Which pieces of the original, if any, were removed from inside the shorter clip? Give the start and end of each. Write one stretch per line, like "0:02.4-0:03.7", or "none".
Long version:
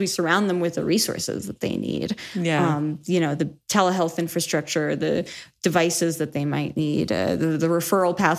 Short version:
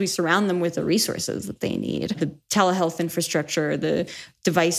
0:02.2-0:03.4